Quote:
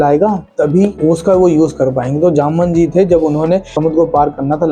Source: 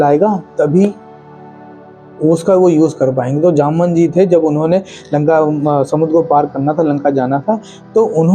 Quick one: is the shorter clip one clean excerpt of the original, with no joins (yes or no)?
no